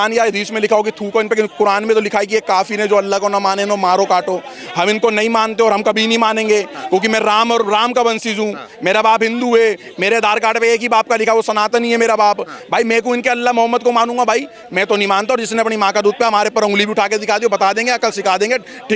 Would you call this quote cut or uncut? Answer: uncut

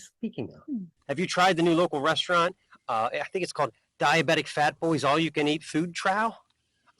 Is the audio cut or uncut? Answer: cut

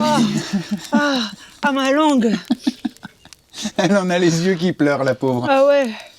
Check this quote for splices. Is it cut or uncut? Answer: uncut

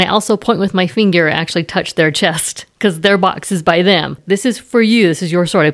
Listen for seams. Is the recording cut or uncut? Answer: cut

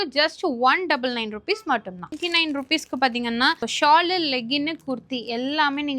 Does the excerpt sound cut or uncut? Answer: cut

